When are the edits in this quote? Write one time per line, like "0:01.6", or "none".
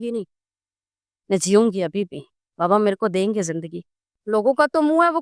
0:04.1

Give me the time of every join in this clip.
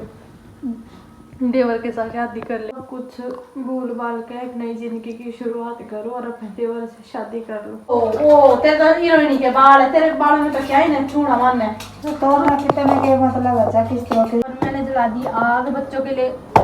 0:02.8
0:07.9
0:14.4

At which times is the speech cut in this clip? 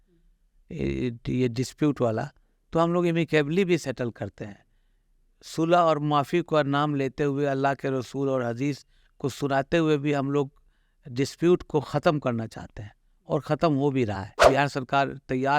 0:14.4

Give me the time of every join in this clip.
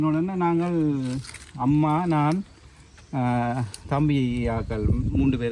none

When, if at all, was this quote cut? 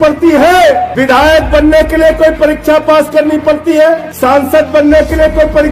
0:00.9
0:04.1

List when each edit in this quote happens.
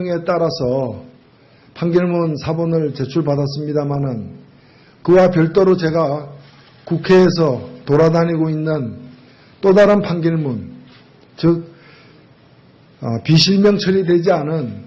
0:13.2

